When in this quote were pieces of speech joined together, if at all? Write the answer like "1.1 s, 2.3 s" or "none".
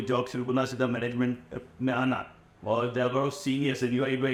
none